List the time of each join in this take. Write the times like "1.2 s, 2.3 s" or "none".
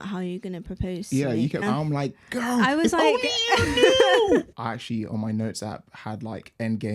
1.6 s, 4.6 s